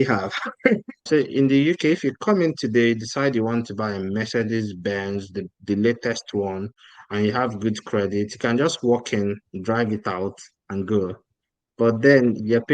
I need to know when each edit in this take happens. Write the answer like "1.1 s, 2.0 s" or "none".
0.9 s